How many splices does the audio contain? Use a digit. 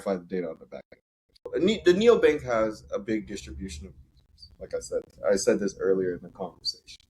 1